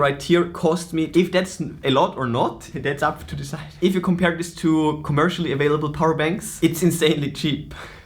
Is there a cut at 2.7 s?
yes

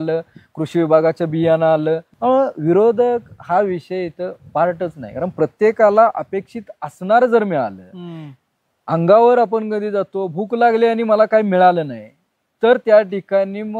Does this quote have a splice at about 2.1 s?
yes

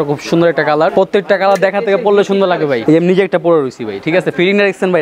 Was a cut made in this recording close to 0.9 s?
yes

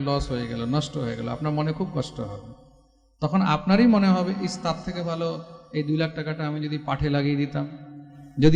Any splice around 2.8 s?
no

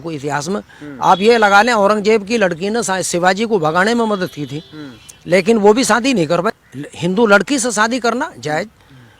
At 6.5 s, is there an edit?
yes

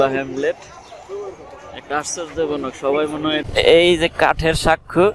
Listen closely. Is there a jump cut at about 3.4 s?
yes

